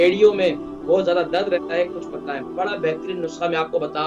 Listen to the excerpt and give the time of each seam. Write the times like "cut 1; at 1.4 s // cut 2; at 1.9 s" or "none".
cut 1; at 2.5 s

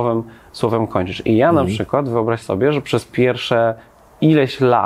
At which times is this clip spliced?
none

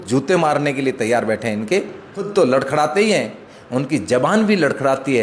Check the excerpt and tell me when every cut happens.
cut 1; at 2.2 s

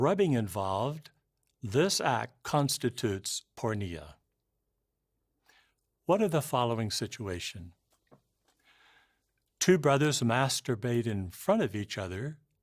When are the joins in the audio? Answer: cut 1; at 4.8 s

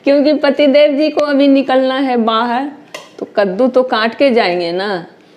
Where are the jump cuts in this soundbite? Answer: none

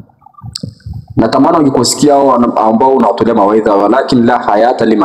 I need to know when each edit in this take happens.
none

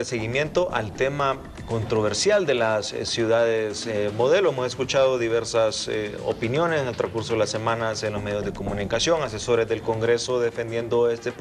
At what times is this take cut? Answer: cut 1; at 6.1 s

